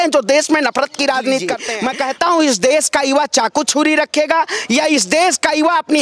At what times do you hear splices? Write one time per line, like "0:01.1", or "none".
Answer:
0:01.7